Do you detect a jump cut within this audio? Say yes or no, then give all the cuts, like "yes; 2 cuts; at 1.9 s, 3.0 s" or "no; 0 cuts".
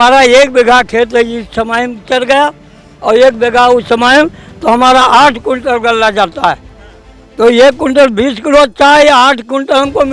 no; 0 cuts